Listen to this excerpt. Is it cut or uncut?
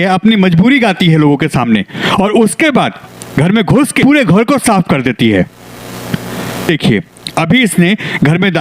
cut